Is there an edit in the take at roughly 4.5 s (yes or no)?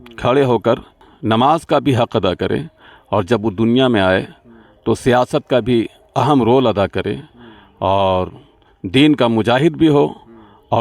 no